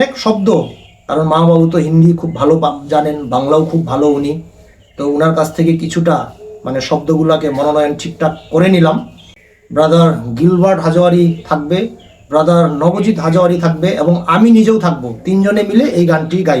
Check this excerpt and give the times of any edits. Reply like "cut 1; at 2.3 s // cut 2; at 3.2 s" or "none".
cut 1; at 9.6 s